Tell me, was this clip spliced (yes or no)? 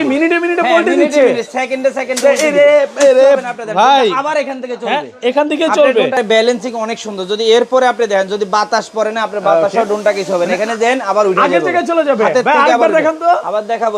yes